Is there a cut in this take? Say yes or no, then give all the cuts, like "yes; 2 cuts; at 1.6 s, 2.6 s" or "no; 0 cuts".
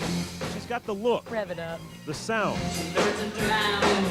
no; 0 cuts